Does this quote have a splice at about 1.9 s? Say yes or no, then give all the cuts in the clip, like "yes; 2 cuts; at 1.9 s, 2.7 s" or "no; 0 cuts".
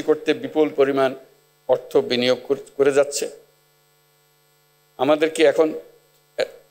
no; 0 cuts